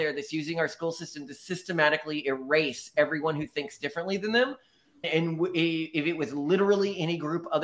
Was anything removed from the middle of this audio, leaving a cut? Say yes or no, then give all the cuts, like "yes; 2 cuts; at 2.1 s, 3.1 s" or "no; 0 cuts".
yes; 1 cut; at 5.1 s